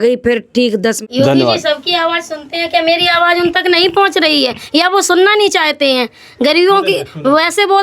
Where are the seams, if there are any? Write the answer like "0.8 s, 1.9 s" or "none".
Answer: 1.0 s

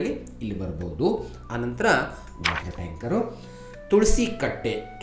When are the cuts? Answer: 2.3 s

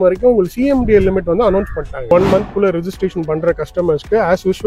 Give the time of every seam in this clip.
2.1 s

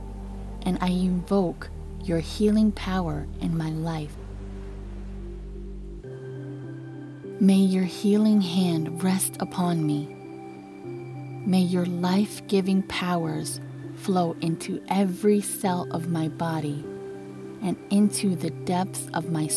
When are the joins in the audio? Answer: 4.2 s, 7.4 s

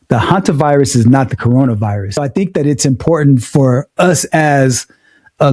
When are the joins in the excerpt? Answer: 2.2 s

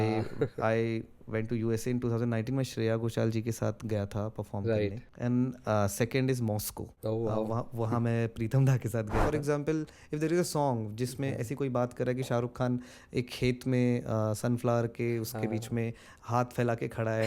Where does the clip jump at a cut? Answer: 5.1 s, 9.2 s

